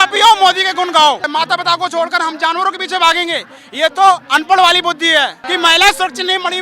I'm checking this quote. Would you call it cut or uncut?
cut